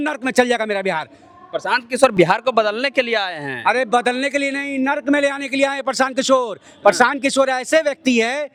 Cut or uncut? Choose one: uncut